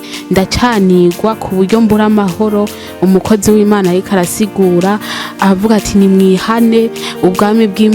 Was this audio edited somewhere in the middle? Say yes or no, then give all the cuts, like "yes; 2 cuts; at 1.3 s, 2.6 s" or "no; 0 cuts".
no; 0 cuts